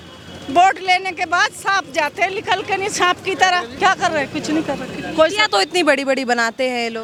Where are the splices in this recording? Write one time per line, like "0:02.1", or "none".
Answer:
none